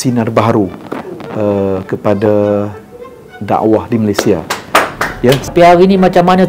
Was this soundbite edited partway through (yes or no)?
yes